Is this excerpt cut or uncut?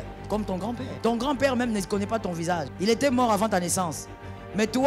cut